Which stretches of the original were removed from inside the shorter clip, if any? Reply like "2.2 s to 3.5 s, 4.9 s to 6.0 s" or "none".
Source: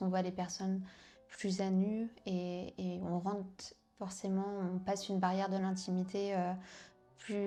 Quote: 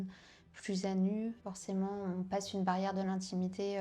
2.2 s to 4.0 s